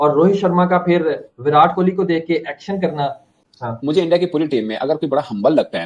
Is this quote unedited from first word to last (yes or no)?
no